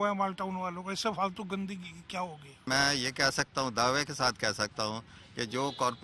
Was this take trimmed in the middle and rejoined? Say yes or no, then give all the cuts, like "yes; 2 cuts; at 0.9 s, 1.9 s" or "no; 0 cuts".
yes; 1 cut; at 2.7 s